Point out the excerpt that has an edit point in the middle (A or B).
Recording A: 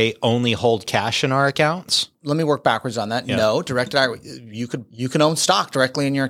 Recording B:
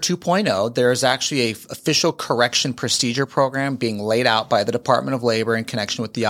A